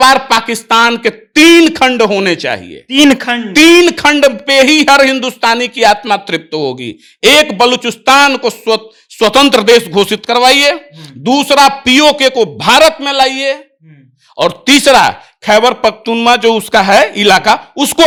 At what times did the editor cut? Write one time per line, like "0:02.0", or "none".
none